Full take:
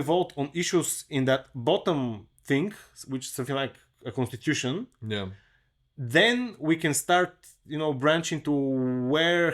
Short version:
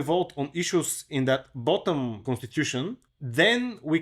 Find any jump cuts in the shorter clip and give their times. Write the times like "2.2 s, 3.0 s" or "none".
2.2 s, 3.1 s